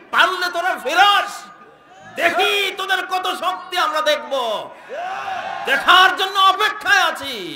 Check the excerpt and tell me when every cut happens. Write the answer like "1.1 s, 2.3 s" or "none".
none